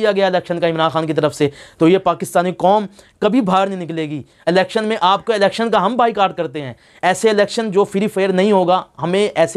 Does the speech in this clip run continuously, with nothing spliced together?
yes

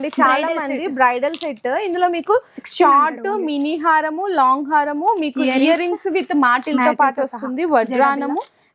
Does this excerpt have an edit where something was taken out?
no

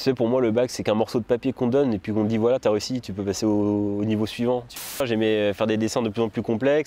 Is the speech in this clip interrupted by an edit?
yes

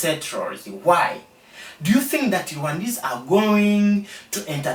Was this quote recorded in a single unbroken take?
yes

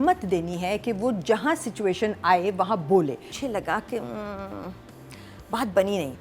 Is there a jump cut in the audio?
yes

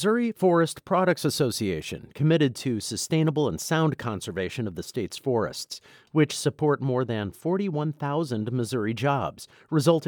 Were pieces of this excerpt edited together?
no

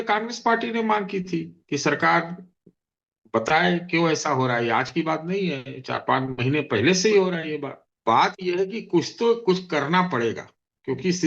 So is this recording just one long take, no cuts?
no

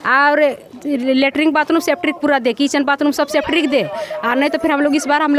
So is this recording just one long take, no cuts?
yes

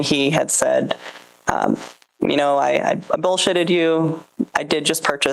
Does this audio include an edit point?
no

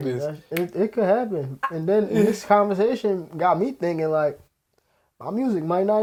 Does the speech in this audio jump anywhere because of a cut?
no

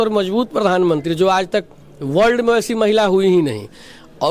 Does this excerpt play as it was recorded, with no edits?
yes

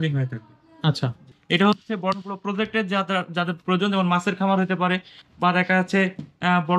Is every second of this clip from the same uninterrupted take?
no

